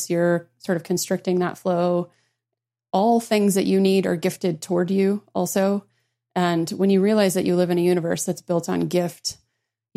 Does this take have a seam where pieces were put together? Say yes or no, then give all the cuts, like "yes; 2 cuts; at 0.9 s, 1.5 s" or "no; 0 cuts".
yes; 1 cut; at 2.4 s